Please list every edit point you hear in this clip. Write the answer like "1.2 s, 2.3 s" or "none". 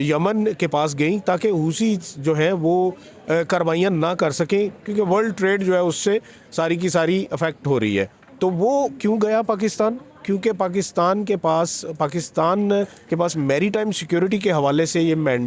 none